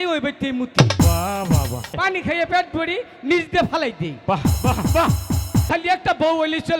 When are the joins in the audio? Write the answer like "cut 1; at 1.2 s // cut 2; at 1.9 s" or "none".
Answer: cut 1; at 2.0 s // cut 2; at 5.7 s